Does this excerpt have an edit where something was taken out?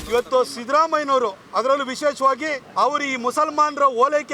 yes; 1 cut; at 2.6 s

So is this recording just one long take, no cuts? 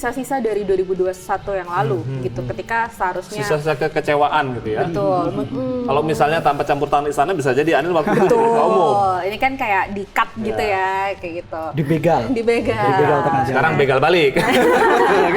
yes; 0 cuts

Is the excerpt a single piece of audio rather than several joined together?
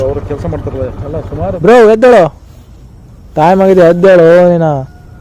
no; 1 cut; at 1.6 s

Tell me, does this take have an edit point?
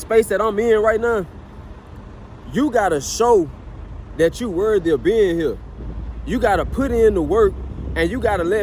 no; 0 cuts

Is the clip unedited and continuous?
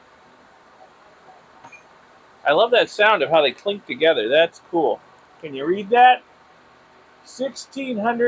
yes; 0 cuts

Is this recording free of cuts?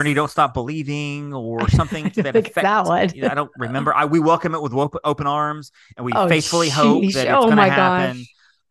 yes; 0 cuts

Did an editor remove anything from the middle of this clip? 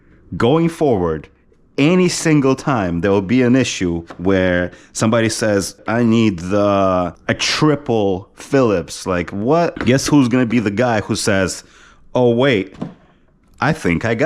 yes; 3 cuts; at 5.8 s, 7.2 s, 9.8 s

